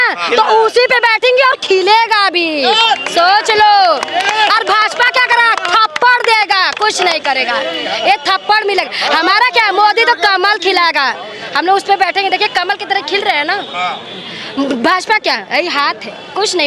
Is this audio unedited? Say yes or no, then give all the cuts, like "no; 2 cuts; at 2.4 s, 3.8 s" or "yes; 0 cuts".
yes; 0 cuts